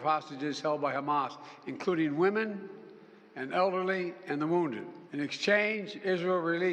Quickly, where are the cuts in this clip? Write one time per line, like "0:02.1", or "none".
0:05.0